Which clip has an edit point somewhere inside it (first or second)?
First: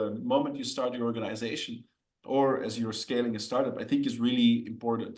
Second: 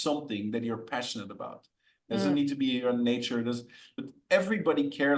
second